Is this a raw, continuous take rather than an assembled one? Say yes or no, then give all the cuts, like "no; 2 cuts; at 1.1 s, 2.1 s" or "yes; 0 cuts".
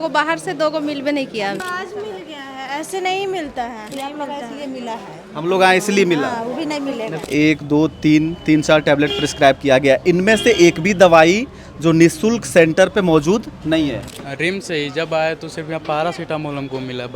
no; 4 cuts; at 1.6 s, 3.9 s, 7.2 s, 14.1 s